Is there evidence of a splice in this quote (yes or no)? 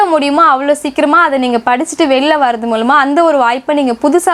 no